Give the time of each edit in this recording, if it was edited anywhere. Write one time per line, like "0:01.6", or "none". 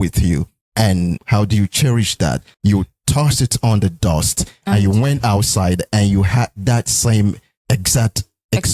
0:01.2
0:02.5